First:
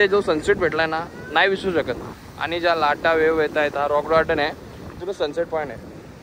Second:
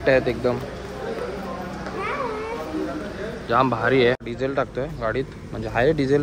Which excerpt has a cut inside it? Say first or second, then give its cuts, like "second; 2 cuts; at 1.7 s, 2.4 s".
second; 1 cut; at 4.2 s